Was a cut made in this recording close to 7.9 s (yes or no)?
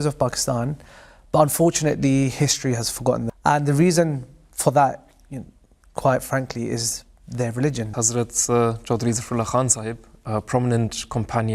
yes